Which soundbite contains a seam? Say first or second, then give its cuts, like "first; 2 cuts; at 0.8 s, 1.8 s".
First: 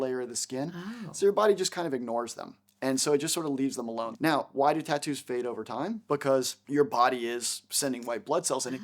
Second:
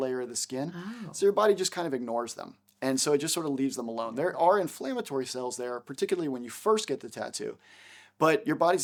first; 2 cuts; at 4.0 s, 6.6 s